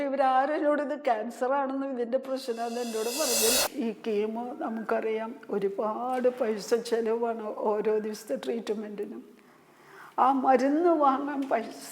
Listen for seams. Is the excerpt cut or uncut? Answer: cut